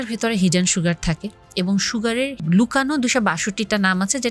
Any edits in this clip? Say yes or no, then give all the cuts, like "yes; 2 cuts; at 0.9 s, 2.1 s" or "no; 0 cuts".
yes; 1 cut; at 2.4 s